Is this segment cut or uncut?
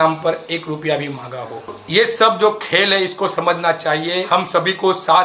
cut